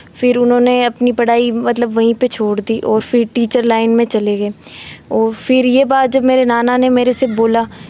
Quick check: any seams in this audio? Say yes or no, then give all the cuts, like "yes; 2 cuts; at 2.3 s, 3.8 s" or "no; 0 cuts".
no; 0 cuts